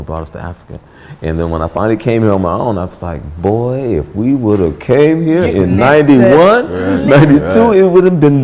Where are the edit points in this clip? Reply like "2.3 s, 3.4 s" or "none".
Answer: none